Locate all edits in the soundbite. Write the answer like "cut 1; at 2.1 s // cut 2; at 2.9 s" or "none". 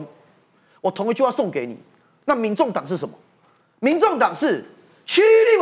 none